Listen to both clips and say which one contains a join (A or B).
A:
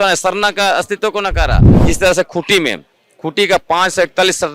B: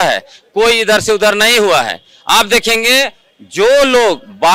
A